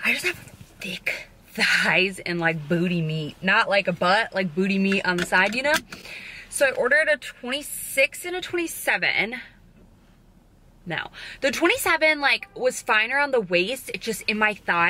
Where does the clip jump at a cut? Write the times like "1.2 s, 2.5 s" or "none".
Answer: none